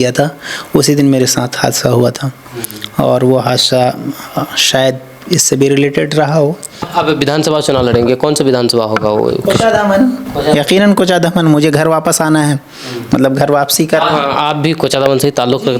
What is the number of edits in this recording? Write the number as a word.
one